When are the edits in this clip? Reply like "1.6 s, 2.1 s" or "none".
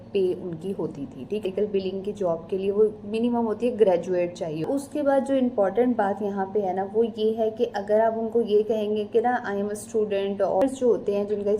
1.4 s, 4.6 s, 10.6 s